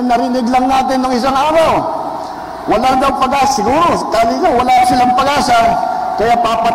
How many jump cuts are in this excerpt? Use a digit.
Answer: 0